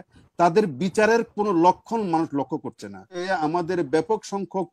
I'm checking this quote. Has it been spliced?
yes; 1 cut; at 3.2 s

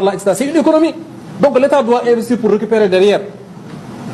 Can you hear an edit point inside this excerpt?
yes; 1 cut; at 2.4 s

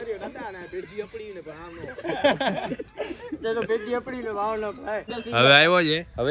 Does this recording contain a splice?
yes; 1 cut; at 5.1 s

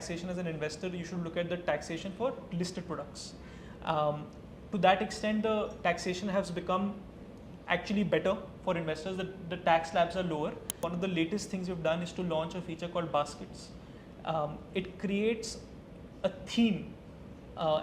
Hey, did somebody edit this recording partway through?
yes; 1 cut; at 10.8 s

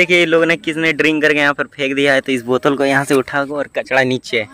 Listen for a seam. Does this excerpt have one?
yes; 1 cut; at 2.2 s

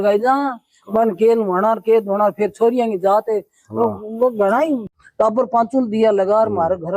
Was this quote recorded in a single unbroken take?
no; 1 cut; at 4.8 s

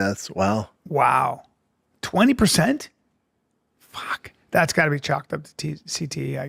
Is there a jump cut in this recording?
no; 0 cuts

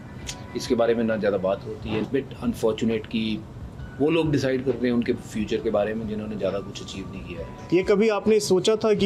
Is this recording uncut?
no; 2 cuts; at 1.9 s, 7.5 s

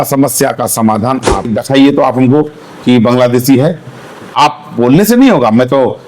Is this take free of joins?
no; 1 cut; at 1.5 s

